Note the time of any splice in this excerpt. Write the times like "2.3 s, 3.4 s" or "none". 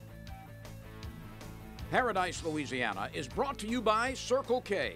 1.8 s